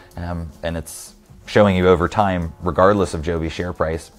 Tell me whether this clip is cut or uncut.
uncut